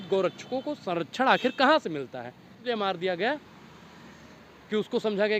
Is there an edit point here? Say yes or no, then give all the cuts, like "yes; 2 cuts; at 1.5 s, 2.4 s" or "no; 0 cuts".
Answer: yes; 1 cut; at 2.6 s